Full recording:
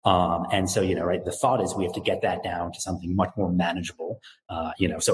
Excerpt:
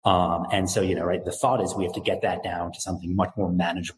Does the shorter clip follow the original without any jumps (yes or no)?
yes